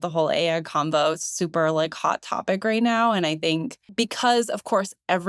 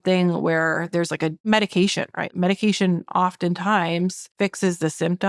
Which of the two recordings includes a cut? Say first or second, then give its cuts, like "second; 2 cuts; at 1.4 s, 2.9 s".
second; 3 cuts; at 1.4 s, 2.3 s, 4.2 s